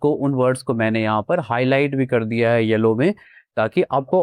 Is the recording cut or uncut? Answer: uncut